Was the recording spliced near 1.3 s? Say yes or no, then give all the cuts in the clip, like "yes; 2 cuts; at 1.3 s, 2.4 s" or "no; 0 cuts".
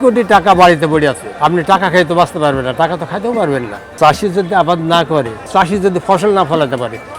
yes; 3 cuts; at 1.3 s, 4.0 s, 5.5 s